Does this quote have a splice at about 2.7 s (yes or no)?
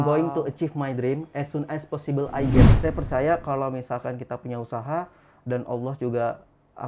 yes